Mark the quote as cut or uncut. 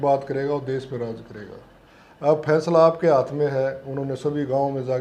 uncut